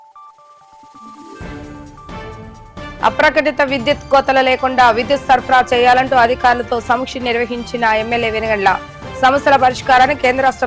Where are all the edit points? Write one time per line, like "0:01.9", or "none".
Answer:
none